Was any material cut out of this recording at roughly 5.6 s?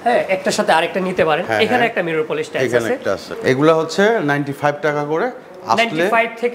no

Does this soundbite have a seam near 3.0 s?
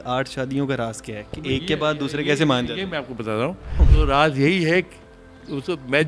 no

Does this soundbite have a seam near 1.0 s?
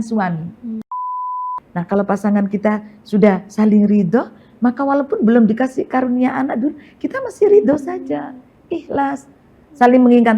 yes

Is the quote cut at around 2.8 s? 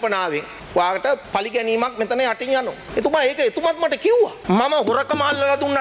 no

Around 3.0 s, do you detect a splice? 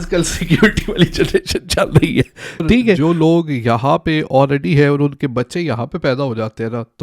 yes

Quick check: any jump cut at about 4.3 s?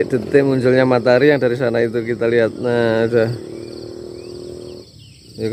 no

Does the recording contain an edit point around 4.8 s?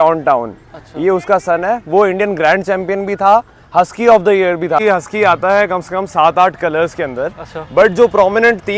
yes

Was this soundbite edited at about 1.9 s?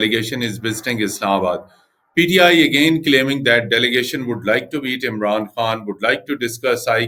no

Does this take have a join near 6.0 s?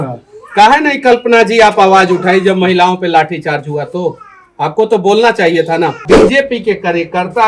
yes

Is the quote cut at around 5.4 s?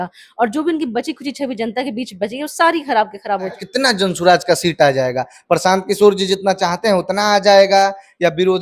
no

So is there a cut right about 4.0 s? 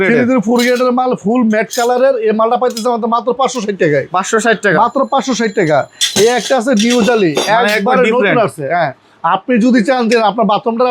no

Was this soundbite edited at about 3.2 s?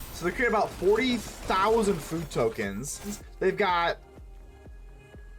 yes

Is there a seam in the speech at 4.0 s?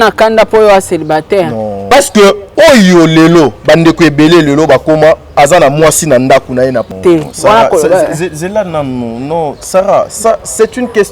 no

